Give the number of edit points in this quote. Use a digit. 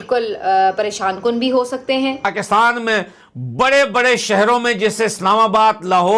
1